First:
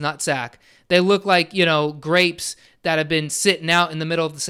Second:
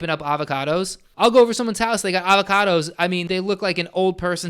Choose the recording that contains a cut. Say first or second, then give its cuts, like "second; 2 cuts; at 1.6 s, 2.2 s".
second; 2 cuts; at 1.0 s, 3.2 s